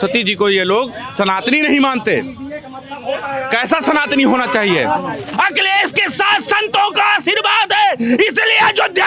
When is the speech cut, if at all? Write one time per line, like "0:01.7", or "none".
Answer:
0:05.2

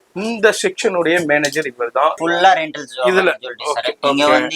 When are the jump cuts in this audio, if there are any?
0:02.2

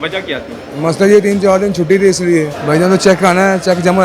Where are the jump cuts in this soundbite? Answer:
0:02.6

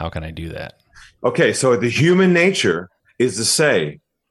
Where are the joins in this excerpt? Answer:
0:03.0

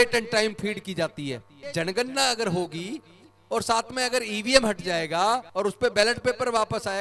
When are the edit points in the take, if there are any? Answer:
0:01.6
0:05.5

